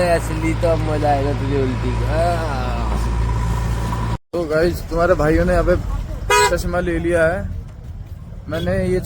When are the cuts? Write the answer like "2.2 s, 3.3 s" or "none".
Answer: 4.2 s